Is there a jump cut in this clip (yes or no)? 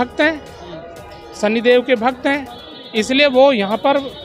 no